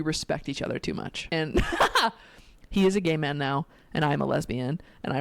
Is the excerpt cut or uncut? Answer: cut